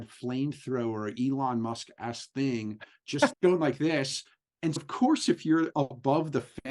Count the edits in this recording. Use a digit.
2